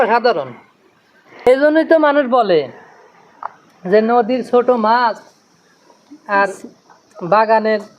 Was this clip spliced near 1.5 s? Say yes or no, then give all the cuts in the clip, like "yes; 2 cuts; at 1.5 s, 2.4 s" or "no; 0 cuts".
yes; 1 cut; at 1.5 s